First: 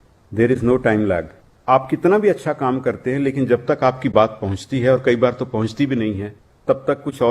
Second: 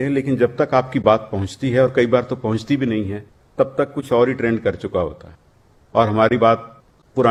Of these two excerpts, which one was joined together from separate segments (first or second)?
first